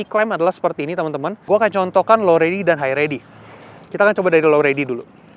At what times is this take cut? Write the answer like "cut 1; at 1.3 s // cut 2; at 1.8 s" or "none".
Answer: cut 1; at 1.5 s